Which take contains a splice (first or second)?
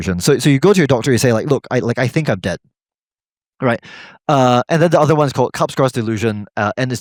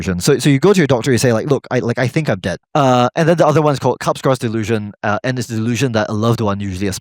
second